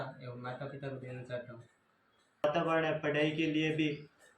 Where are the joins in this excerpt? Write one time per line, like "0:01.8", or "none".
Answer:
0:02.4